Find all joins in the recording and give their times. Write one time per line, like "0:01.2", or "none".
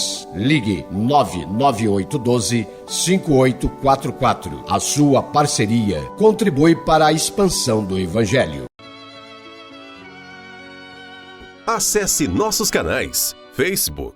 0:08.8

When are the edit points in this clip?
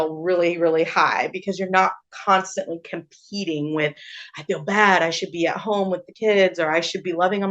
none

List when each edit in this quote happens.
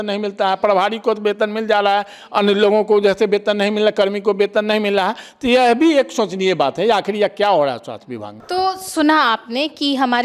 none

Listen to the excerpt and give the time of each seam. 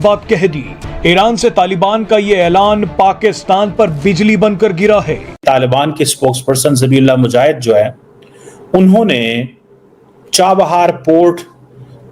0:05.2

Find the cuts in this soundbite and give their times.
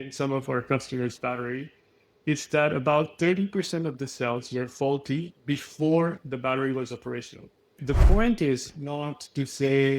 0:07.8

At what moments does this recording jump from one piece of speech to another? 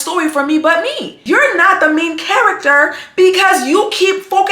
0:01.1

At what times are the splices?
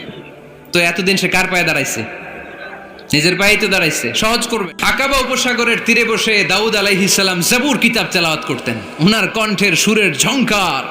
0:04.7

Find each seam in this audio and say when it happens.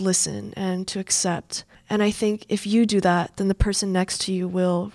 0:01.7

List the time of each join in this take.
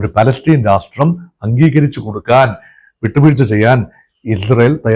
none

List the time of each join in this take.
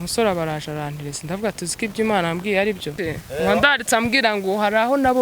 0:02.9

